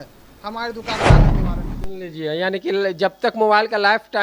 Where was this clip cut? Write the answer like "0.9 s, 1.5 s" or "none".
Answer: 1.0 s, 1.6 s